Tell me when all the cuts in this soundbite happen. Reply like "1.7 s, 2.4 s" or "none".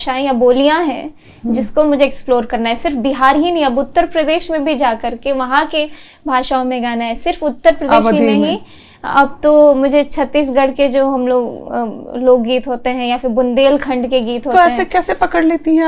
none